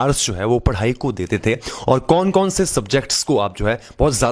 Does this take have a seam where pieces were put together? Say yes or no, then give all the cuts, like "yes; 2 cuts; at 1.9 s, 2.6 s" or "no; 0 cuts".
no; 0 cuts